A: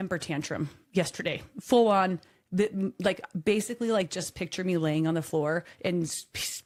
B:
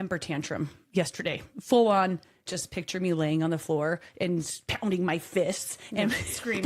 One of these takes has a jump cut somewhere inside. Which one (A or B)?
B